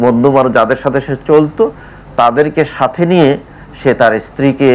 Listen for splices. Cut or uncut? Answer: uncut